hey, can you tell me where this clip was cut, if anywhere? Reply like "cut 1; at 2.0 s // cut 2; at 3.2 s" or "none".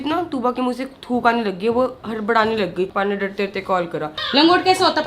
cut 1; at 2.9 s // cut 2; at 4.1 s